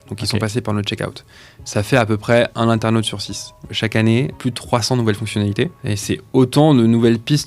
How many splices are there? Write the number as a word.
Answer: three